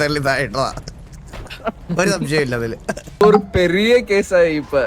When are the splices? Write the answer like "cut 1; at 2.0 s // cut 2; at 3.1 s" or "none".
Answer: cut 1; at 3.2 s